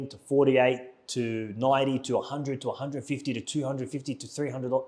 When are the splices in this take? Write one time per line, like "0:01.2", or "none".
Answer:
none